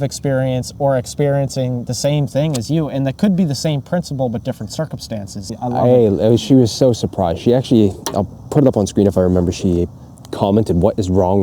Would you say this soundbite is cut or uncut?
cut